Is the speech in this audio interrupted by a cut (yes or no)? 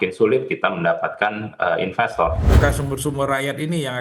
yes